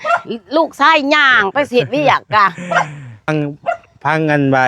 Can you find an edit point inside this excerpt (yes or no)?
yes